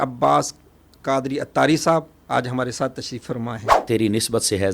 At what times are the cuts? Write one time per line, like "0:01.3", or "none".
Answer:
0:03.7